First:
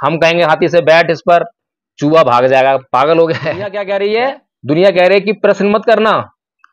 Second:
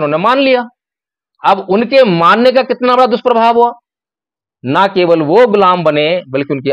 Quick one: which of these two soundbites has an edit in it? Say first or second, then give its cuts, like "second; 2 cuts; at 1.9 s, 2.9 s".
first; 1 cut; at 3.8 s